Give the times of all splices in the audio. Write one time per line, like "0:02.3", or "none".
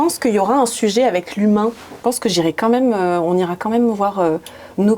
0:01.9